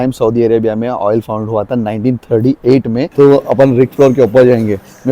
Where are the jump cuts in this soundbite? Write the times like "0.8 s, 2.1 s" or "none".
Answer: 3.1 s